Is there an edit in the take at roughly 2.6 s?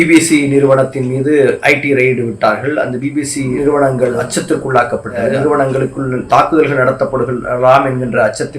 no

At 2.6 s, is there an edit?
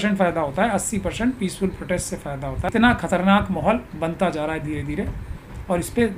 yes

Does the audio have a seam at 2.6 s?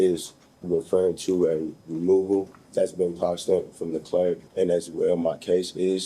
yes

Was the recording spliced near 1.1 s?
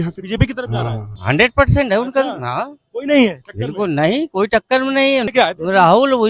yes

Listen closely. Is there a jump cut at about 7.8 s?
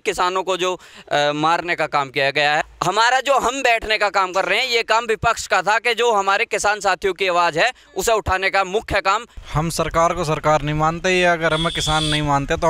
no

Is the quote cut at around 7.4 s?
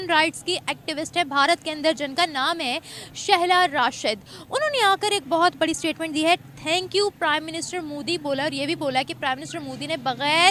no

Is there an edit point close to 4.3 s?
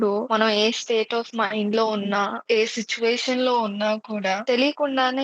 no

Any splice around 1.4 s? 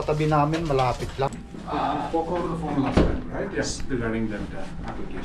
yes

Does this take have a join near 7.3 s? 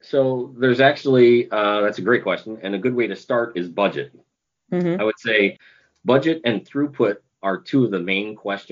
yes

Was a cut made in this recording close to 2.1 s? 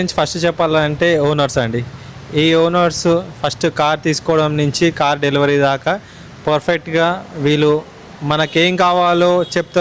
no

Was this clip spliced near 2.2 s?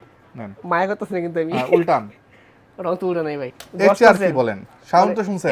no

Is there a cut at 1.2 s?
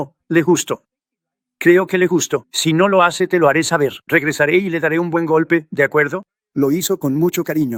no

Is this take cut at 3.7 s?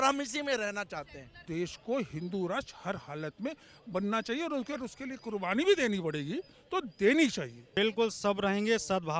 no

